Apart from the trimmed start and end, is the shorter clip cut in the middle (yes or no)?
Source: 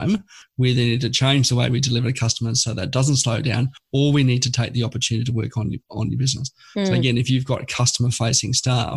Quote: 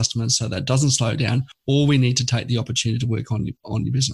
no